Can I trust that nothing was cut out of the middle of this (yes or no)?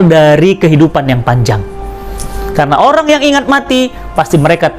yes